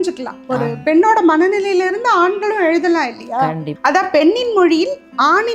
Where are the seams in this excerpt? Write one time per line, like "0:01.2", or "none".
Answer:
0:03.7